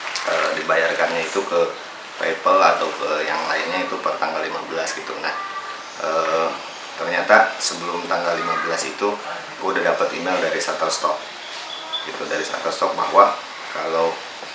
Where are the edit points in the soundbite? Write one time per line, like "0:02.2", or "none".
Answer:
none